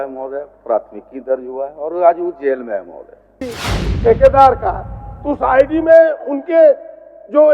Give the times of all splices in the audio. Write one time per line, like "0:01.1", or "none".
0:03.4